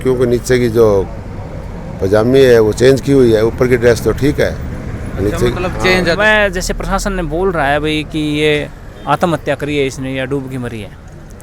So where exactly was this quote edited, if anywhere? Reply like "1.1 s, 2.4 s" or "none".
6.2 s